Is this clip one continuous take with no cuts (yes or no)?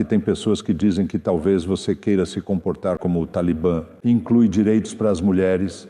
no